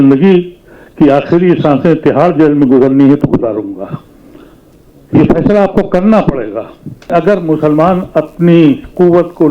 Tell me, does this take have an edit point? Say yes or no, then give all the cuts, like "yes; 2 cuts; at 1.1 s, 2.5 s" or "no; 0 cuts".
yes; 1 cut; at 7.1 s